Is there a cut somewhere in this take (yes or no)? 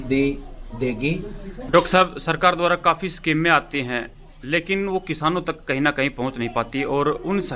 yes